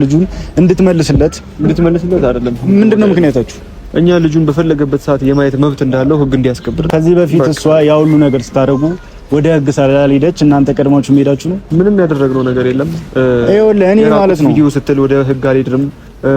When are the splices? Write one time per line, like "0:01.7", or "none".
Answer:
0:06.8

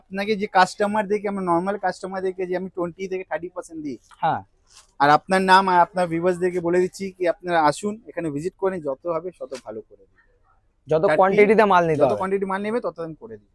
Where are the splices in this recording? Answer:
none

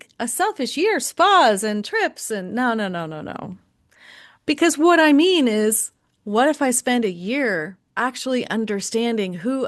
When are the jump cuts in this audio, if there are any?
0:07.8

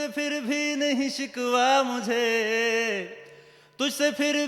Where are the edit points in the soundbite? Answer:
none

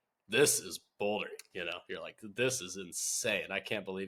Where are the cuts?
none

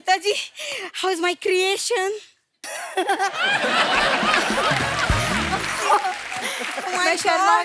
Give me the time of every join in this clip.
none

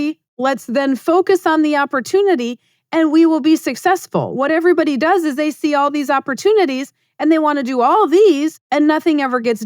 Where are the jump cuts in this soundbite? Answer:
none

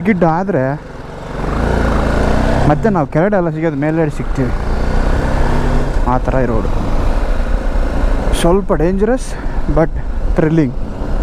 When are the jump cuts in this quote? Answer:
none

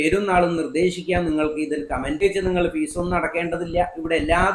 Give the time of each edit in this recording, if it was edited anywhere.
0:02.2

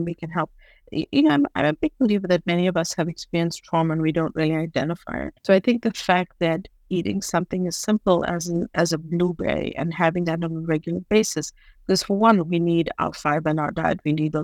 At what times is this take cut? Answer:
0:05.5

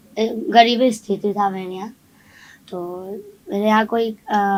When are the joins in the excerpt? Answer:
none

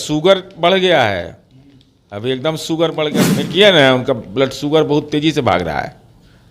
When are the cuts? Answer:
0:03.3

